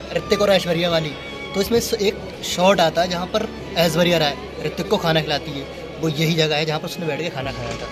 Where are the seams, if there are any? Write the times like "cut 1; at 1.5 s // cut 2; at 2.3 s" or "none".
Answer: none